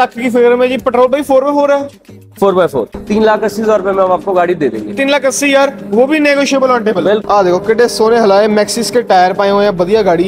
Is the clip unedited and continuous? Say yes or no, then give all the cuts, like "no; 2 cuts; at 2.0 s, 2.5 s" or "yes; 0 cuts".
no; 2 cuts; at 3.0 s, 7.2 s